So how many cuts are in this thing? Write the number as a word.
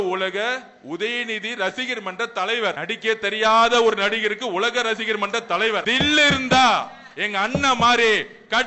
two